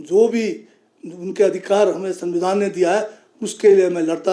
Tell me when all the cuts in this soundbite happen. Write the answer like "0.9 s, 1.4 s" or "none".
none